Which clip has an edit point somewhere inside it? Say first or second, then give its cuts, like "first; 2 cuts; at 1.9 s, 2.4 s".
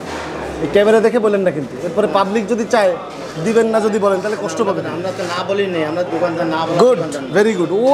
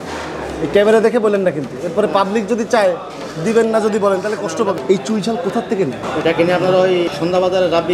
second; 3 cuts; at 4.8 s, 6.0 s, 7.1 s